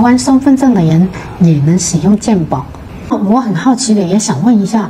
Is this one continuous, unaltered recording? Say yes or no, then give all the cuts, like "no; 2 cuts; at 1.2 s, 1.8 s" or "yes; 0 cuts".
no; 1 cut; at 3.1 s